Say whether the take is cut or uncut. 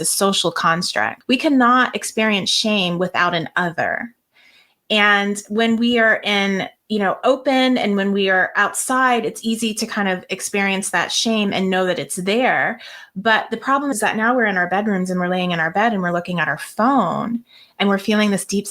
cut